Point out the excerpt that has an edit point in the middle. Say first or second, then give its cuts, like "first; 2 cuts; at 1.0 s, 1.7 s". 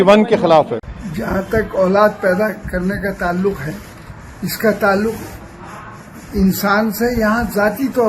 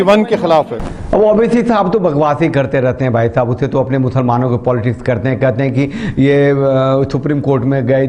first; 1 cut; at 0.9 s